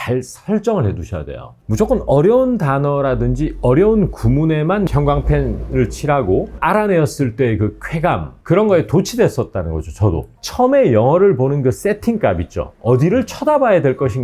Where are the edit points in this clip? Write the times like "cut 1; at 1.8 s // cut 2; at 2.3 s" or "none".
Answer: cut 1; at 1.6 s // cut 2; at 4.9 s // cut 3; at 6.5 s // cut 4; at 10.3 s